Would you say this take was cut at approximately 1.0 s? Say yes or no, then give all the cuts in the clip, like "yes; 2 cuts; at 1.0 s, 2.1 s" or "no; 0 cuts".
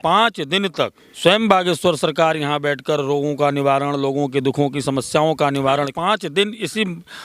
yes; 2 cuts; at 1.0 s, 5.9 s